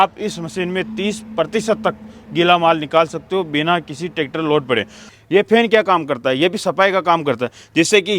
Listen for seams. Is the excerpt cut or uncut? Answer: cut